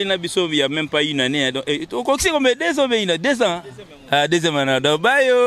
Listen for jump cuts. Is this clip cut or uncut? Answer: uncut